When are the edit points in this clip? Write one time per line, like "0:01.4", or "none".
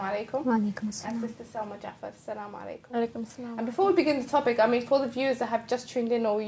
0:02.9